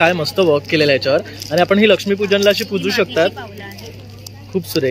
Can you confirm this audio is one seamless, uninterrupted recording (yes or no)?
yes